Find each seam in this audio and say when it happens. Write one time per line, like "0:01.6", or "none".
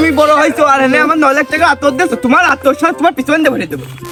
none